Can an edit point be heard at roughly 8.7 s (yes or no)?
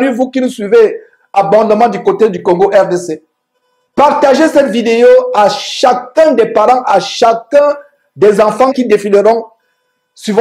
yes